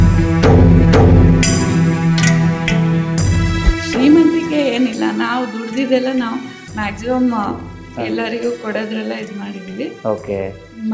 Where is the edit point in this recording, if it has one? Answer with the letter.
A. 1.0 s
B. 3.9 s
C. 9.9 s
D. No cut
B